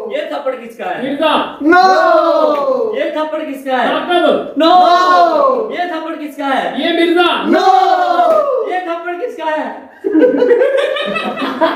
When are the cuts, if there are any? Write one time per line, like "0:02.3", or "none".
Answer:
none